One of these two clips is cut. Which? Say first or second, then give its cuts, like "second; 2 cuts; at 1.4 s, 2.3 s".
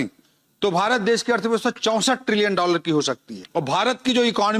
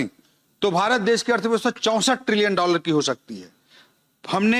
first; 1 cut; at 3.3 s